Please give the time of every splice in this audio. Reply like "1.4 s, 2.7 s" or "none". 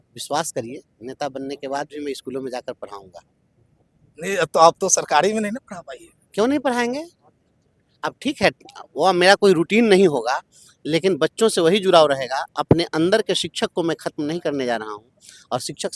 none